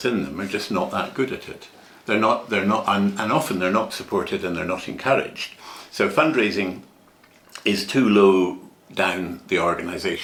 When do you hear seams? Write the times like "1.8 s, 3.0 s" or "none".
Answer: none